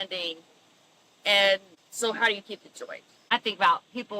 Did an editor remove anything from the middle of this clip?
yes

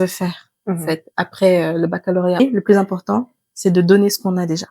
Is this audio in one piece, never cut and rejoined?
no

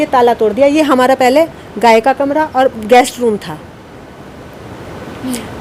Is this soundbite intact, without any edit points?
yes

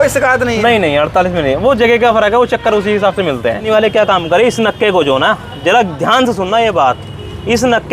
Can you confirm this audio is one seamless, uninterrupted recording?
no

